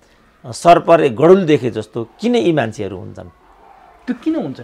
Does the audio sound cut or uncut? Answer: uncut